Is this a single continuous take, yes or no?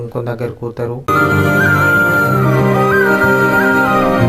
yes